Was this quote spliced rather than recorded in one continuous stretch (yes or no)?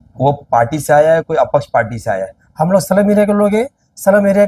yes